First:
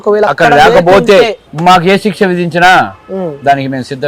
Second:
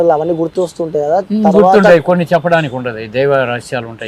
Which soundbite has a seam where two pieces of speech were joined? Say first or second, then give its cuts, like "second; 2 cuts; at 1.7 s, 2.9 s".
first; 1 cut; at 1.4 s